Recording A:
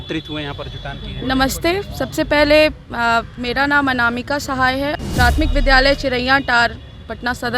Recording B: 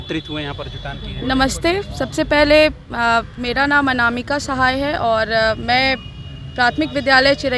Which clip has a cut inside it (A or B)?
A